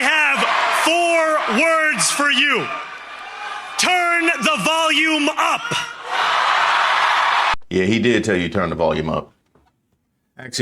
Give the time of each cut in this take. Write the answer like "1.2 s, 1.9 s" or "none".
7.6 s

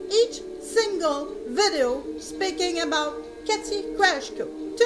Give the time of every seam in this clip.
none

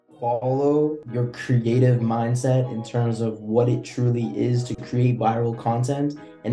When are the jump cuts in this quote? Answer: 1.0 s

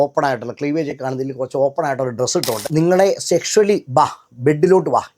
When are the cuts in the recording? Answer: 2.6 s

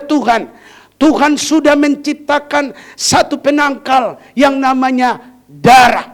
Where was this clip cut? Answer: none

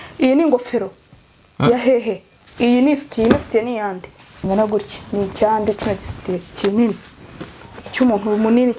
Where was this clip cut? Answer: 4.4 s

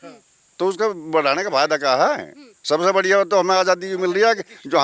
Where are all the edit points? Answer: none

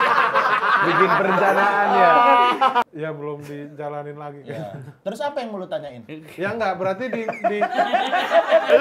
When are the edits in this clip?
2.8 s

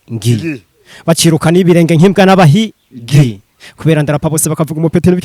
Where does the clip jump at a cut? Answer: none

